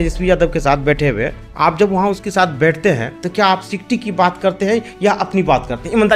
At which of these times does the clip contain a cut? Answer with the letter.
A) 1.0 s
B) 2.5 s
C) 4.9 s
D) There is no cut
D